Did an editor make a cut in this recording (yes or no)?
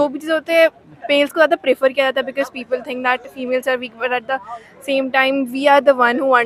no